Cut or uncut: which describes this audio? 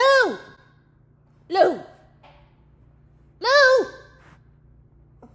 cut